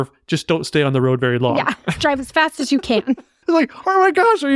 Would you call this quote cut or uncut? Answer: cut